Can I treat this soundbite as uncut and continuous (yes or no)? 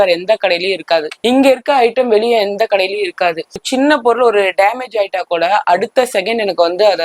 no